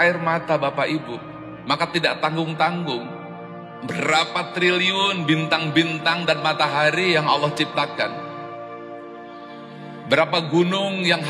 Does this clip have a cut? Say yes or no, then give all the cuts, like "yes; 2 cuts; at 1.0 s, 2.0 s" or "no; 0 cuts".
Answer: yes; 2 cuts; at 8.1 s, 10.0 s